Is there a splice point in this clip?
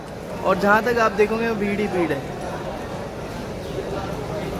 no; 0 cuts

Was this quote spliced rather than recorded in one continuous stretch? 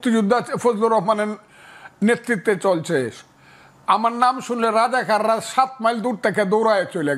no; 0 cuts

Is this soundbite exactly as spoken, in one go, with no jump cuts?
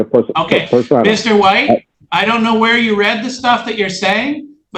no; 1 cut; at 2.0 s

